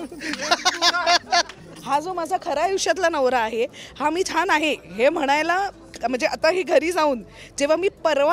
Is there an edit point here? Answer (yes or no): yes